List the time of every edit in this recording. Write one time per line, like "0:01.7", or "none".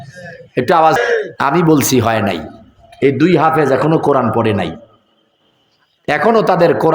0:01.0